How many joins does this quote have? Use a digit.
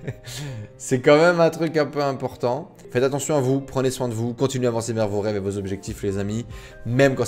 1